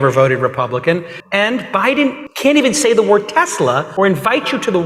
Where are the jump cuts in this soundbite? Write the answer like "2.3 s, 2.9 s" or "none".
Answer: 1.2 s, 2.3 s, 3.9 s